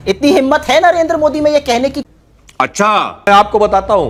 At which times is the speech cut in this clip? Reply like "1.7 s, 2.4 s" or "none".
none